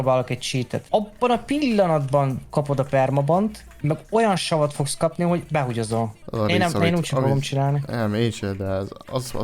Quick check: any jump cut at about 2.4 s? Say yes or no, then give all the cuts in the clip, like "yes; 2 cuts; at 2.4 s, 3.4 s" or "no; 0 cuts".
no; 3 cuts; at 0.8 s, 3.7 s, 6.2 s